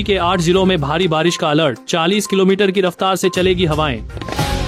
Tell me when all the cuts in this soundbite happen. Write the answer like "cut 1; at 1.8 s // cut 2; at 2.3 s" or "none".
none